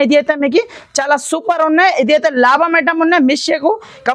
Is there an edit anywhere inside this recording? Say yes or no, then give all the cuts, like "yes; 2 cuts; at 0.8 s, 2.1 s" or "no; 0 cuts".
no; 0 cuts